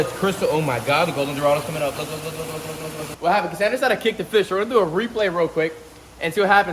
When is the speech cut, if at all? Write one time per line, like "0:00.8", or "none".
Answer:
0:03.1

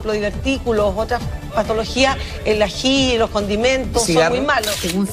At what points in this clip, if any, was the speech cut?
0:03.1

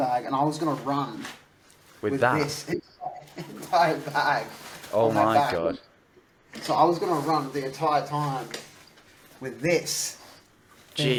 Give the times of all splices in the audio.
none

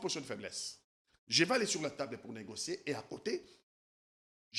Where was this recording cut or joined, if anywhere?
none

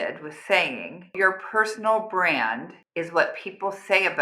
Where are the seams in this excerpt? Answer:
0:01.1

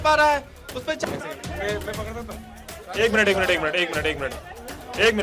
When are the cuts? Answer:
0:01.0

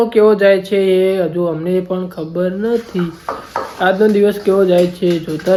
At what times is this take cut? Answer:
none

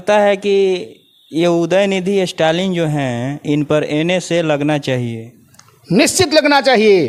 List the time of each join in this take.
none

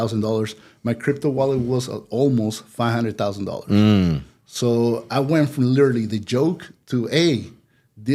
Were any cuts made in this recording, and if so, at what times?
none

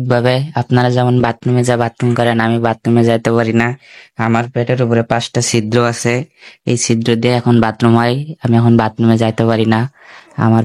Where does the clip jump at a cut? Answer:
none

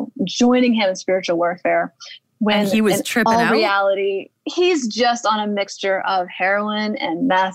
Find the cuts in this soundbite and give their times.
none

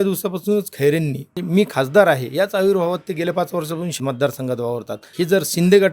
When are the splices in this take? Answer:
0:01.3
0:03.9
0:05.1

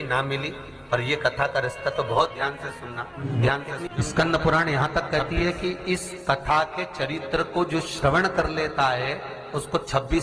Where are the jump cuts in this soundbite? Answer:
0:03.2
0:03.9

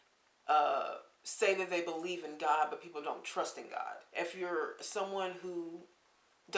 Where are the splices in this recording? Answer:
0:04.0

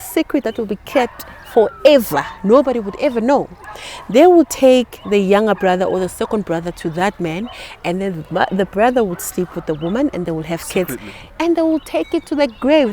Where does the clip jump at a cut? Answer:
0:11.2

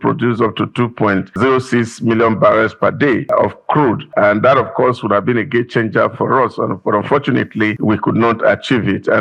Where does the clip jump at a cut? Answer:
0:01.4
0:03.6
0:07.8

